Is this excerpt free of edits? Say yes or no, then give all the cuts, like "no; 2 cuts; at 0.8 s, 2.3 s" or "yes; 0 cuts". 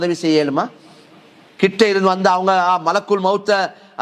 yes; 0 cuts